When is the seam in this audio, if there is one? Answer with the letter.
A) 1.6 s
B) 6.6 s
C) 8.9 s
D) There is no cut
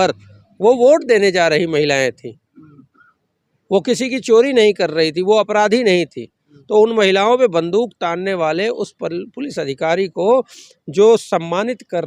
D